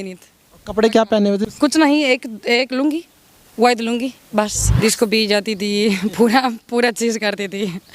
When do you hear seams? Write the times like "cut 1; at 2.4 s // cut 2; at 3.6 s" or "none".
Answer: cut 1; at 1.4 s // cut 2; at 4.6 s